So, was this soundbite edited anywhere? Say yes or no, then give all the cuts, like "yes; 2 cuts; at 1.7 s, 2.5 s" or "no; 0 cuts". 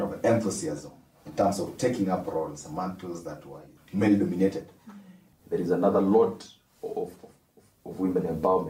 yes; 2 cuts; at 3.7 s, 5.3 s